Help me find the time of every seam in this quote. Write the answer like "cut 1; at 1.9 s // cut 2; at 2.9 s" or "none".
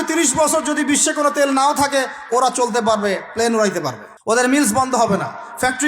cut 1; at 4.1 s